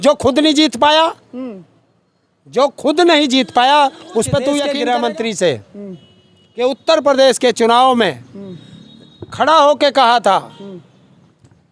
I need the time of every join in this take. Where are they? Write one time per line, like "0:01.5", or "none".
0:04.7